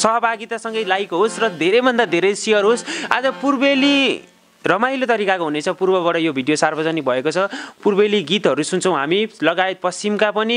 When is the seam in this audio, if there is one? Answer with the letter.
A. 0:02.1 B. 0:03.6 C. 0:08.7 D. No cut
D